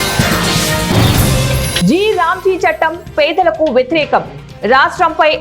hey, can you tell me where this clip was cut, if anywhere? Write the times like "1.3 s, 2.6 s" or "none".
1.7 s